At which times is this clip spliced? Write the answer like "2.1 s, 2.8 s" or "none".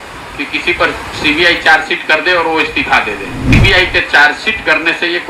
3.5 s

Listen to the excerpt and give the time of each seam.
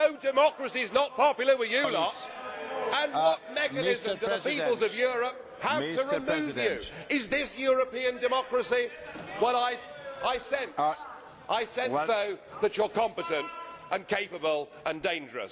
8.4 s

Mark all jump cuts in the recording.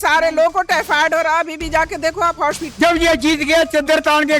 2.6 s

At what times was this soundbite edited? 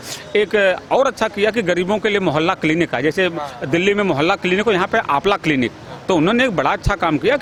none

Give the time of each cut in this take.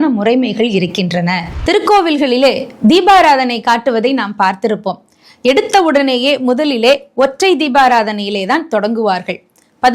1.5 s

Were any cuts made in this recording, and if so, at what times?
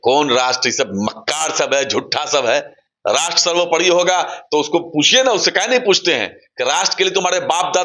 none

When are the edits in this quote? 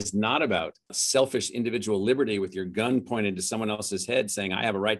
1.0 s

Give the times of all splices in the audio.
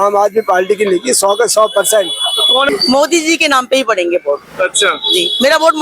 2.7 s

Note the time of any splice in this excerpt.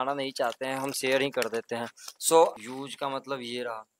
2.5 s

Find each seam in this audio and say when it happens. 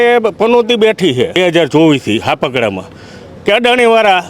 1.3 s

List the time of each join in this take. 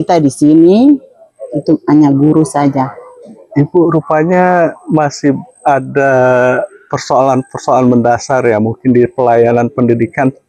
none

